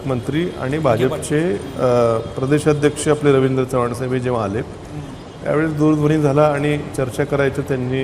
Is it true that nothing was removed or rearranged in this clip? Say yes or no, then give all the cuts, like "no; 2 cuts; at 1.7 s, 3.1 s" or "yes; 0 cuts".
yes; 0 cuts